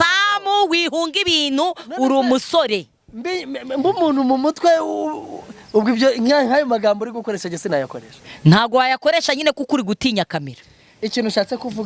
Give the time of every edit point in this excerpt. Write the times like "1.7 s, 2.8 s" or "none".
none